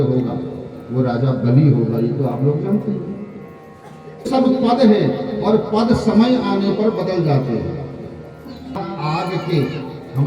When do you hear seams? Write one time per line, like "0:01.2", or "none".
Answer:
0:04.3
0:08.8